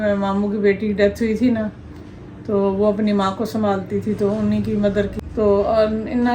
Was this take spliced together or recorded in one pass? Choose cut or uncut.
cut